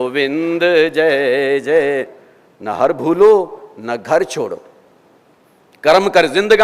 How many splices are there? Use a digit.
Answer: 1